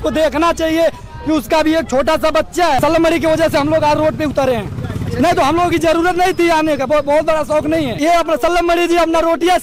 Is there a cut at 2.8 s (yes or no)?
yes